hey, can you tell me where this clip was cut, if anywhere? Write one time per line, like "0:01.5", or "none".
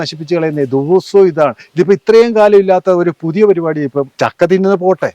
0:04.1